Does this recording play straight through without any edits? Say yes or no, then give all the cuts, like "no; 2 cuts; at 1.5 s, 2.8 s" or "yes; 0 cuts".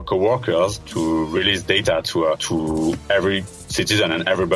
no; 3 cuts; at 0.8 s, 2.4 s, 3.6 s